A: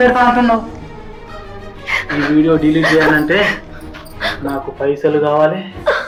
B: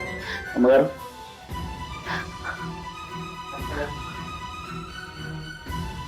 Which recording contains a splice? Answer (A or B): B